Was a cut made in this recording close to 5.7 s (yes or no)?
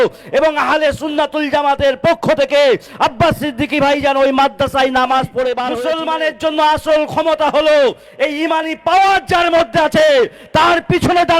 yes